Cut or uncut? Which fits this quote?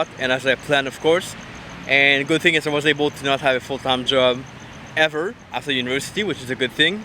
uncut